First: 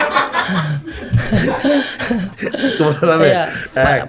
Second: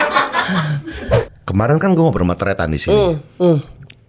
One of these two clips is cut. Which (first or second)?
second